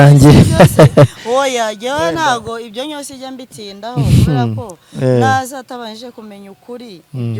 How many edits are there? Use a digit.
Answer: 0